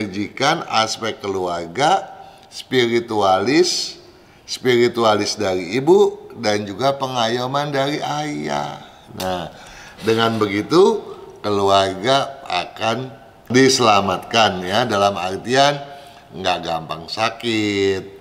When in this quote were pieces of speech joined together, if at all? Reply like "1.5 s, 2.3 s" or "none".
none